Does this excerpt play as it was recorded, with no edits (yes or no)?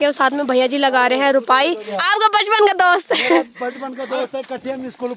no